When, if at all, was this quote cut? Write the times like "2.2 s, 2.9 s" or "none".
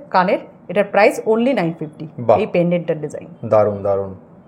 none